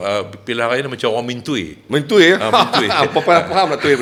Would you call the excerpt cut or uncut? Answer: uncut